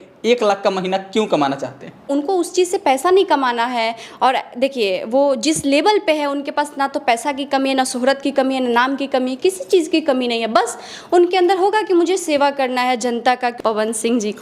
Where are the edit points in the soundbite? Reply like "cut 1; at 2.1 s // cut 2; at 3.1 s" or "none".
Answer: cut 1; at 2.0 s // cut 2; at 13.6 s